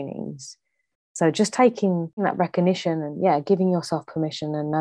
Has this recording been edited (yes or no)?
yes